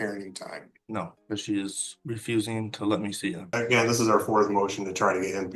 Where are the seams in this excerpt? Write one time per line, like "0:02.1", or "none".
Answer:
0:01.2
0:01.9
0:03.5